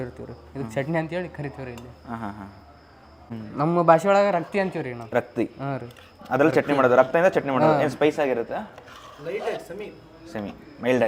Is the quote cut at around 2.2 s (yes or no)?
no